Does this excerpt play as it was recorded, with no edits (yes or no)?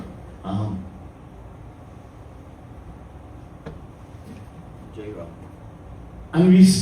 no